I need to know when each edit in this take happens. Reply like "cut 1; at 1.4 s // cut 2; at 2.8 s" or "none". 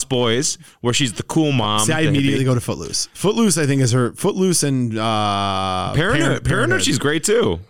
none